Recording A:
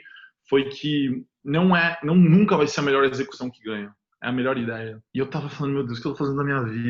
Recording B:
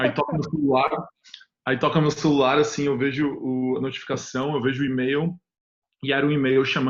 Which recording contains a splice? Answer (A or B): A